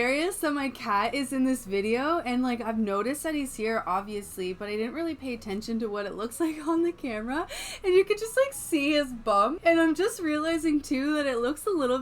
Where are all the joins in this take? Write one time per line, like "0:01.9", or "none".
0:09.6

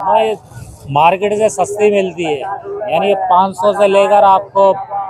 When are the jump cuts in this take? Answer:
none

